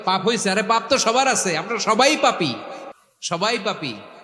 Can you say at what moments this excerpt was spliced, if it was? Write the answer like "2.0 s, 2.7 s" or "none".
none